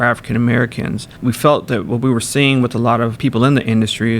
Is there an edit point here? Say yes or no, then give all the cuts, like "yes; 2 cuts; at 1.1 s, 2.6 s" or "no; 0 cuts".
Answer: yes; 2 cuts; at 1.1 s, 3.1 s